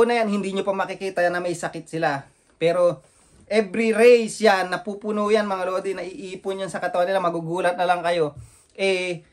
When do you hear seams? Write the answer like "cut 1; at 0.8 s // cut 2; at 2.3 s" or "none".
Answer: none